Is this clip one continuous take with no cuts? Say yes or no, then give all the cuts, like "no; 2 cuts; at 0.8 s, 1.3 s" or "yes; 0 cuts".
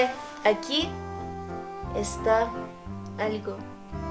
yes; 0 cuts